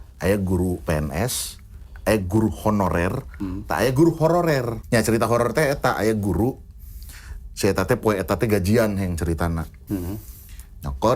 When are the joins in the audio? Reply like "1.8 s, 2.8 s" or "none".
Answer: 4.8 s, 9.8 s